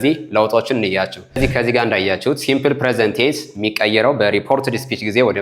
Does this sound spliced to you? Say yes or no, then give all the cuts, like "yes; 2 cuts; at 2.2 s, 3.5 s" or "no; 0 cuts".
yes; 1 cut; at 1.4 s